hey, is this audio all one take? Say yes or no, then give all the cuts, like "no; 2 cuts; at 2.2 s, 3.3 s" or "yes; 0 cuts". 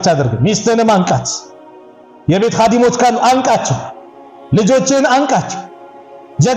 yes; 0 cuts